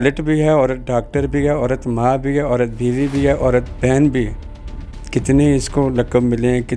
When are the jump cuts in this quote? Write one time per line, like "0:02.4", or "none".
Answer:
none